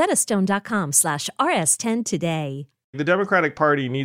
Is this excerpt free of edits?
no; 1 cut; at 3.0 s

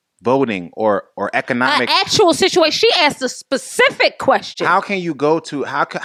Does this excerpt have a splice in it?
no; 0 cuts

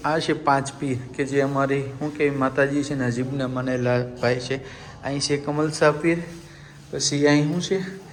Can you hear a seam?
no; 0 cuts

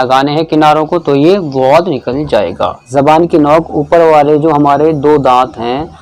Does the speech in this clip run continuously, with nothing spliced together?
no; 1 cut; at 2.8 s

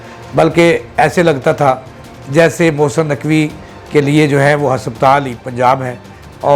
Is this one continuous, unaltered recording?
yes; 0 cuts

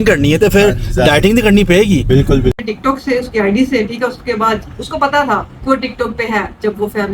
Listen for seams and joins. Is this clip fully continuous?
no; 1 cut; at 2.6 s

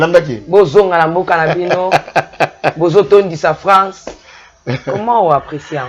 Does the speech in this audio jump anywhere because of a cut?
no; 0 cuts

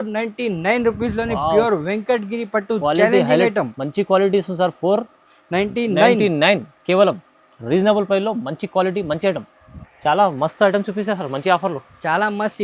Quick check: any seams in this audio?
no; 0 cuts

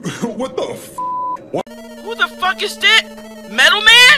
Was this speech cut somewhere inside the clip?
yes; 1 cut; at 1.7 s

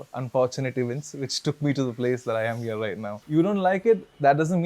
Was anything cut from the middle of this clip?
yes; 1 cut; at 3.1 s

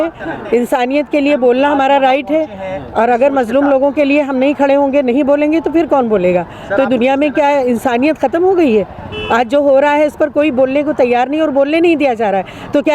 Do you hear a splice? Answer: no; 0 cuts

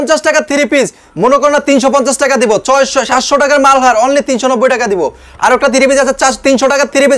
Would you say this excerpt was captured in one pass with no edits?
yes; 0 cuts

